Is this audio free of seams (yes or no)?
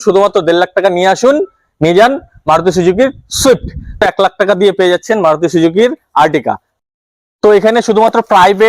no